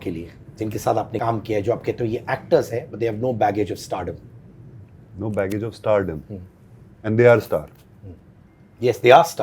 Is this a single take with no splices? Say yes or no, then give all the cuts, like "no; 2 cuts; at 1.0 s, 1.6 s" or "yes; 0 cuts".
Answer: no; 1 cut; at 1.1 s